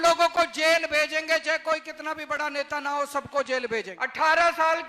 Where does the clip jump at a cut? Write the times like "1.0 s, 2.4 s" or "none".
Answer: 4.0 s